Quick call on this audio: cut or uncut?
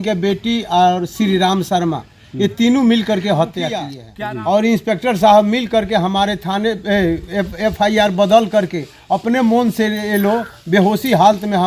cut